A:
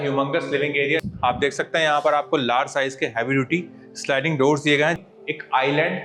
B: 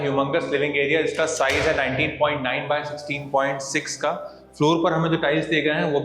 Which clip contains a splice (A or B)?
A